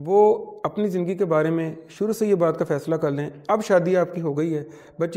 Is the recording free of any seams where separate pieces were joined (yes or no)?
yes